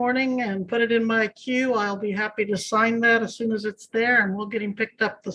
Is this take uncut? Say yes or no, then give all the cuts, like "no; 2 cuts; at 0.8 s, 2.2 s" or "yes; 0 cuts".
yes; 0 cuts